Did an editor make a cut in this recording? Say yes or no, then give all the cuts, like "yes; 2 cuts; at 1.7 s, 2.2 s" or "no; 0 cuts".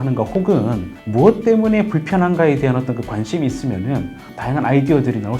yes; 1 cut; at 0.9 s